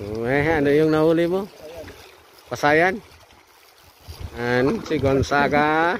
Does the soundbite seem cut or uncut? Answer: cut